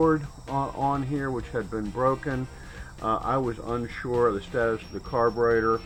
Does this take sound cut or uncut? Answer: uncut